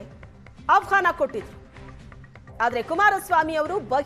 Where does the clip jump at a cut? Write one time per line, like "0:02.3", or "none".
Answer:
none